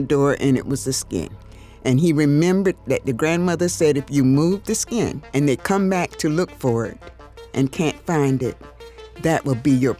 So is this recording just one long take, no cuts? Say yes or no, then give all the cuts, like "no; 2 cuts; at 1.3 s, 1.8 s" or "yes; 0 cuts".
yes; 0 cuts